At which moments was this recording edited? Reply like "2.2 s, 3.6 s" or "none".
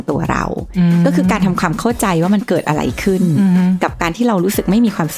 none